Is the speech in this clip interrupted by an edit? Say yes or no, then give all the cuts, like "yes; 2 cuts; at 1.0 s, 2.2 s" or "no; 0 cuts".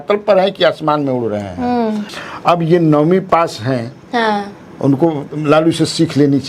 yes; 1 cut; at 2.1 s